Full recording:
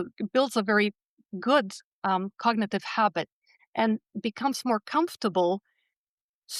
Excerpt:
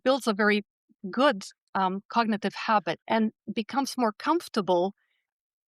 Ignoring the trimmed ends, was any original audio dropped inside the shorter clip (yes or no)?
yes